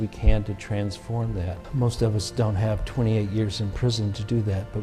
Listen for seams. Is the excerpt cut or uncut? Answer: cut